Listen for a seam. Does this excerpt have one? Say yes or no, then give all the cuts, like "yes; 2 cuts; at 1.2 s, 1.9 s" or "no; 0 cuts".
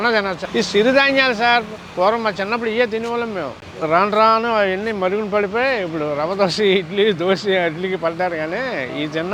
no; 0 cuts